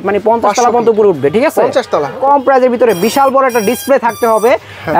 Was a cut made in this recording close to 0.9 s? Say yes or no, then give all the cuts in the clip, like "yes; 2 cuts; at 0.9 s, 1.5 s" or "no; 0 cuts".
no; 1 cut; at 2.2 s